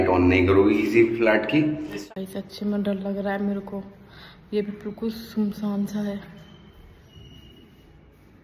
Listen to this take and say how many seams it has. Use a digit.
1